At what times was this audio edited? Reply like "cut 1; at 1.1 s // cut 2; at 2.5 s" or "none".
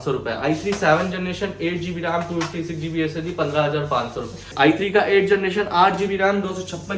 cut 1; at 4.5 s

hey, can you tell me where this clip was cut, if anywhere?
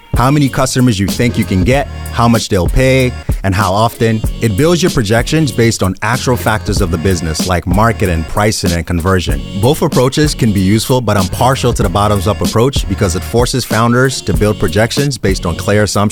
none

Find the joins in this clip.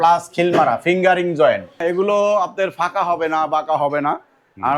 cut 1; at 1.8 s

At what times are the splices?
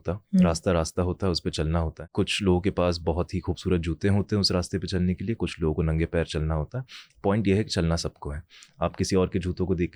cut 1; at 2.0 s

